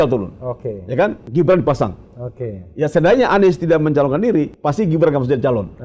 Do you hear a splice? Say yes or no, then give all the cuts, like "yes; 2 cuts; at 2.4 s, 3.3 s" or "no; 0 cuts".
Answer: yes; 2 cuts; at 1.2 s, 4.5 s